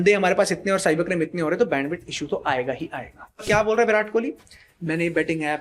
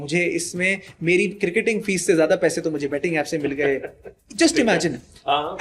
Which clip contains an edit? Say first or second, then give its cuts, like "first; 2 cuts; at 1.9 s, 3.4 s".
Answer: first; 1 cut; at 3.4 s